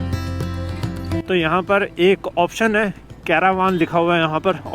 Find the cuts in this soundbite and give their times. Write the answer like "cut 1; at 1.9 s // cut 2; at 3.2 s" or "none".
cut 1; at 1.2 s